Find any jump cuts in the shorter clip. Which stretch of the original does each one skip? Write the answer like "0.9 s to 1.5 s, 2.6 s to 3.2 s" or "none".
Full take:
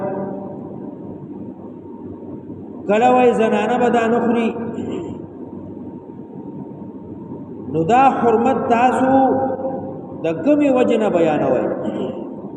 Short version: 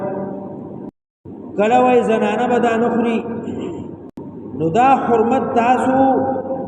1.1 s to 2.4 s, 5.4 s to 7.2 s